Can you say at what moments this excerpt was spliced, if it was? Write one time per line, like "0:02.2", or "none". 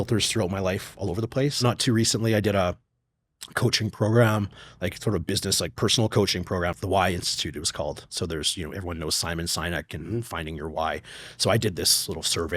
0:01.6
0:06.8